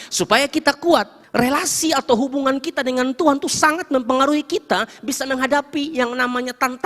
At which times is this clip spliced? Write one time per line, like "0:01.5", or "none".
0:01.2